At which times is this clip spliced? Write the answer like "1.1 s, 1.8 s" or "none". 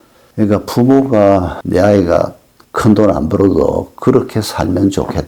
none